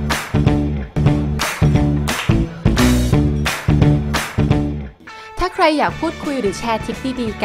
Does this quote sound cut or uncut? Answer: cut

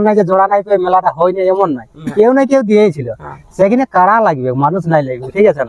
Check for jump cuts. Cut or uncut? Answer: uncut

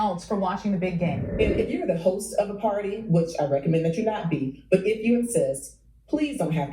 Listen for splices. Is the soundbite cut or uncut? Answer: cut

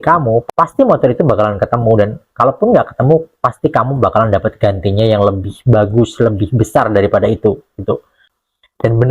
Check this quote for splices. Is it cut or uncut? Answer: cut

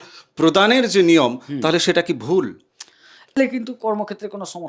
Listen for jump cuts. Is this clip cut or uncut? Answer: cut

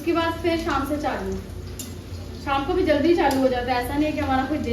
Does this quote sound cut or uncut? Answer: uncut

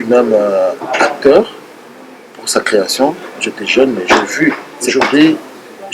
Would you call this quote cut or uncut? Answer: cut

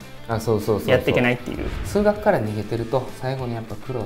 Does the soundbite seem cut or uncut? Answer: cut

